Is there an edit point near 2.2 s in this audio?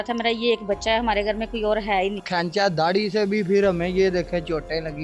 yes; 1 cut; at 2.2 s

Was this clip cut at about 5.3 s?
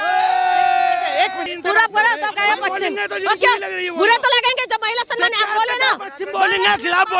no; 1 cut; at 1.4 s

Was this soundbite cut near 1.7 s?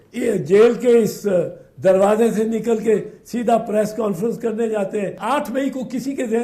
no; 1 cut; at 5.2 s

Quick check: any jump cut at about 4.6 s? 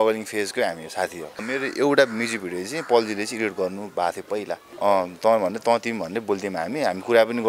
yes; 2 cuts; at 1.4 s, 4.6 s

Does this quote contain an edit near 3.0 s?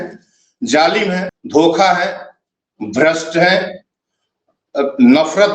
no; 1 cut; at 1.3 s

